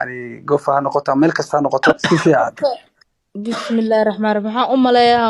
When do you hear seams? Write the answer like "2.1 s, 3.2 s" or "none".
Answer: 2.0 s